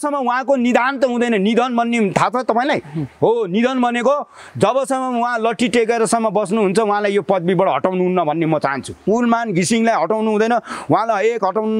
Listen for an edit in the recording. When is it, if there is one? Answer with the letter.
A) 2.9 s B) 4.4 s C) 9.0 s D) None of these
C